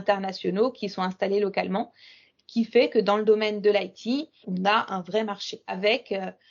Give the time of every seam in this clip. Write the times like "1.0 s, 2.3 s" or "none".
4.4 s, 5.8 s

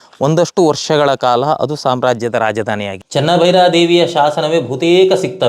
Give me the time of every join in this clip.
3.0 s

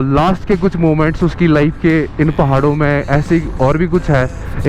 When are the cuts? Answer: none

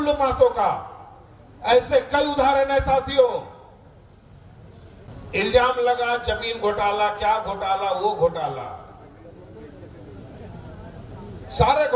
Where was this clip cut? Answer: 5.1 s

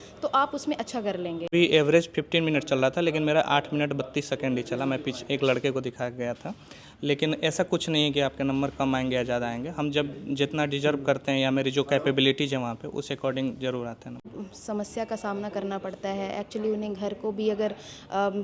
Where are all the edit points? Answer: 1.5 s, 14.3 s

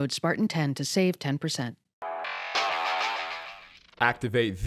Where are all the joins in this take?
1.9 s, 3.2 s

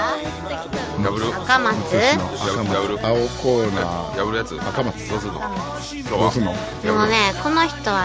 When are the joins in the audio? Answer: none

